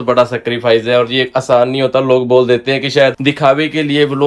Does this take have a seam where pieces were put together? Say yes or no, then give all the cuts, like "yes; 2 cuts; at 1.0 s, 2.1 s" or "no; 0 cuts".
no; 0 cuts